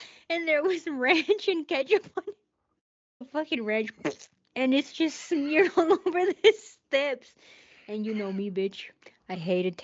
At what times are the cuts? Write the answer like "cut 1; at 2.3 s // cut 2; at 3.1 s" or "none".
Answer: cut 1; at 3.3 s

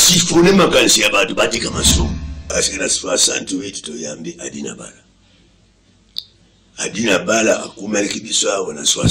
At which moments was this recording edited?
cut 1; at 2.3 s

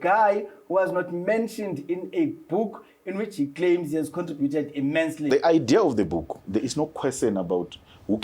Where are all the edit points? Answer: cut 1; at 5.3 s

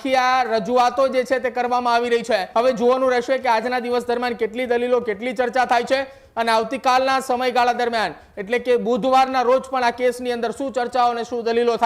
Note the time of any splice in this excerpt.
cut 1; at 2.5 s

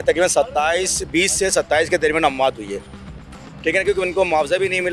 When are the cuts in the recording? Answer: cut 1; at 3.1 s

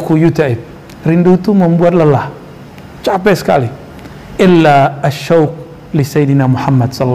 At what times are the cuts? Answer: none

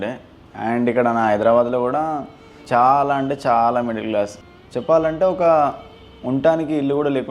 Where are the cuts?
cut 1; at 2.5 s // cut 2; at 4.4 s

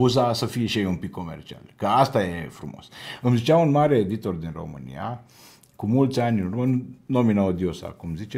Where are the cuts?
none

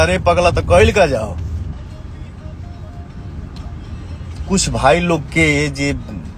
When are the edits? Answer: cut 1; at 1.7 s

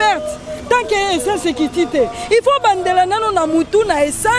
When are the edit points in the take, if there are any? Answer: none

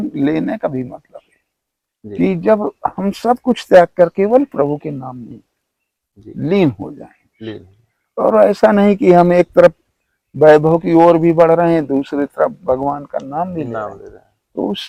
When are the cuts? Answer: none

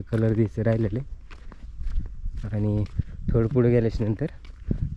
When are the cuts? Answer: none

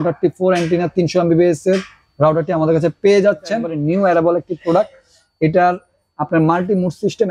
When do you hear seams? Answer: cut 1; at 3.7 s

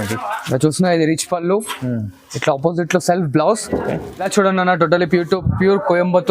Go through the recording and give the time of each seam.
cut 1; at 4.1 s

